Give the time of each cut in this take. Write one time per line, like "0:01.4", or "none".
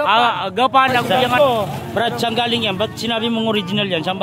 0:01.0